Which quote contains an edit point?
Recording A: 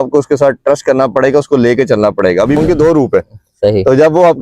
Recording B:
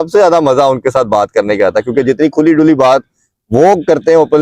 A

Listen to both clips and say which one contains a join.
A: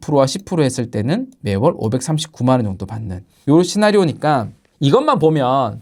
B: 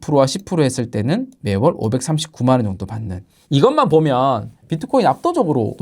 B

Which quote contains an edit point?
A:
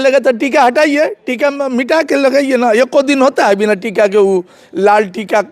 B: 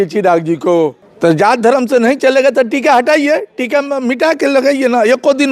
B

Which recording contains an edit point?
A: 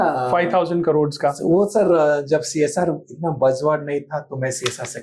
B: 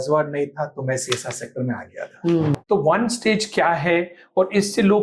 B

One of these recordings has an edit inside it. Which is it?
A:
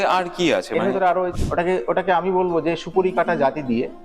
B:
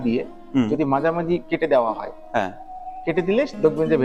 A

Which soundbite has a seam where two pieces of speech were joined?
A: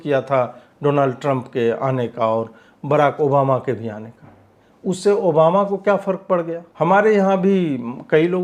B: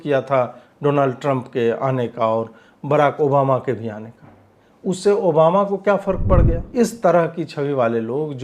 B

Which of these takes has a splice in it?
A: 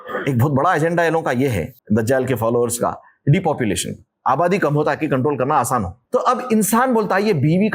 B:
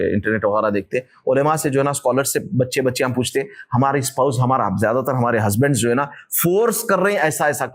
A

